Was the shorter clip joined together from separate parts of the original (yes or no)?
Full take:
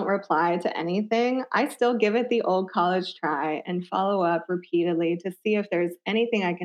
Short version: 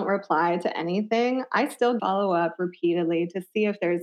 yes